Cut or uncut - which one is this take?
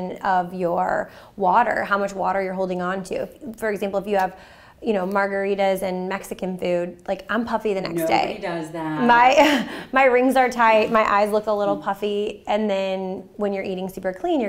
uncut